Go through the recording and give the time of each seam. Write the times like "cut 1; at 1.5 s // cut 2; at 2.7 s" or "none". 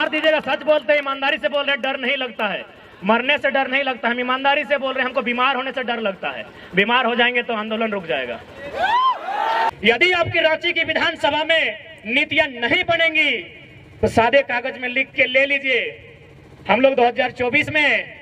cut 1; at 9.7 s